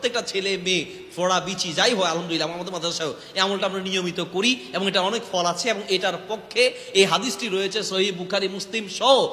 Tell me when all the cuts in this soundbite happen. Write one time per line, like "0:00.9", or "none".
none